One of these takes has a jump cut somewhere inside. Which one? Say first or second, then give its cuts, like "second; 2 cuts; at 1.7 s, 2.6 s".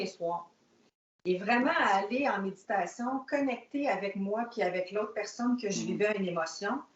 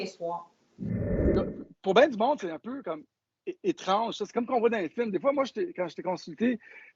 second; 1 cut; at 1.1 s